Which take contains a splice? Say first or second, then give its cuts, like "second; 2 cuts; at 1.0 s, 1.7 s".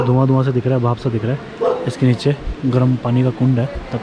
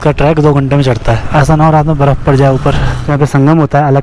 second; 2 cuts; at 1.2 s, 3.1 s